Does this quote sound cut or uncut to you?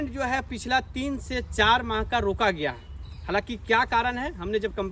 uncut